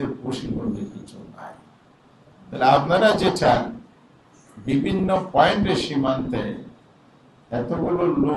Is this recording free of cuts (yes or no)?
yes